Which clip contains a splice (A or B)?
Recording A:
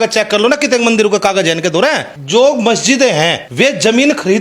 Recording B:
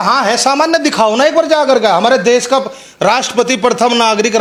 A